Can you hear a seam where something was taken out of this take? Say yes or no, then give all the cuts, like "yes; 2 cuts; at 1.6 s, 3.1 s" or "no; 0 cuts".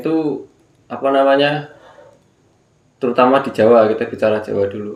no; 0 cuts